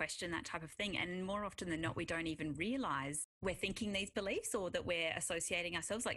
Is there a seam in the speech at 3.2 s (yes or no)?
yes